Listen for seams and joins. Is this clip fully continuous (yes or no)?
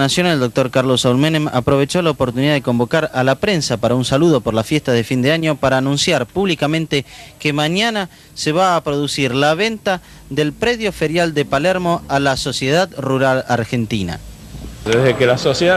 yes